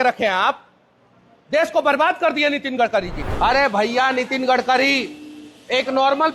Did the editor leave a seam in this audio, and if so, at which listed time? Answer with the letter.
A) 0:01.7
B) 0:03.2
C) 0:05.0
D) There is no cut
B